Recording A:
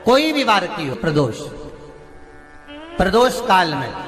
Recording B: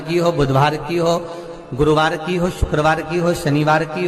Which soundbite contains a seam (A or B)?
A